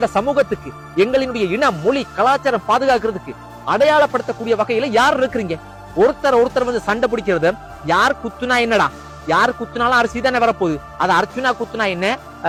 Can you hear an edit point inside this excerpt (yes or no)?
no